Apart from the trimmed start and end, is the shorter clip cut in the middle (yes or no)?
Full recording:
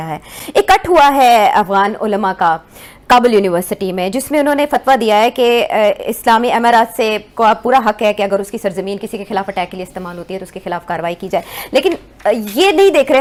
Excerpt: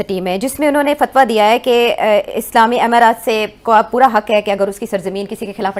no